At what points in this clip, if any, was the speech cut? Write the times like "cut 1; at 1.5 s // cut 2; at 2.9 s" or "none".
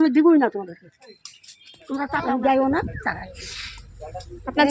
cut 1; at 2.1 s